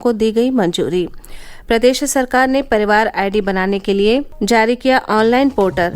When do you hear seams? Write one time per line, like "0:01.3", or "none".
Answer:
0:04.3